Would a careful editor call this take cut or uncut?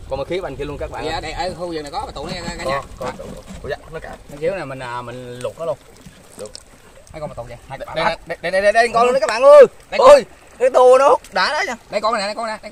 uncut